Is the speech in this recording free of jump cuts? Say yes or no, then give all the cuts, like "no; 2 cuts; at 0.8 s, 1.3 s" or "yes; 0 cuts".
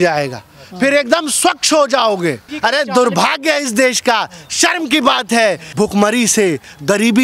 no; 2 cuts; at 2.5 s, 5.6 s